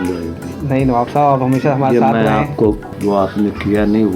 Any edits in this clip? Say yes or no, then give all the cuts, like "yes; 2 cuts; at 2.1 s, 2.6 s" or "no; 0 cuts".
yes; 1 cut; at 2.9 s